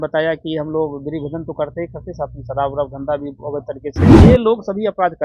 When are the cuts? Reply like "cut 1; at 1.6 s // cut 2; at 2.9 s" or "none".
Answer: cut 1; at 3.8 s // cut 2; at 4.3 s